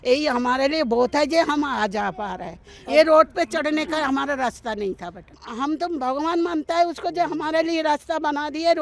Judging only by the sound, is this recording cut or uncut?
cut